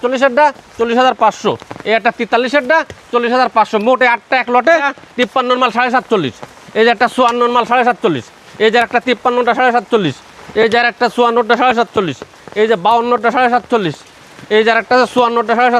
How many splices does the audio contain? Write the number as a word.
one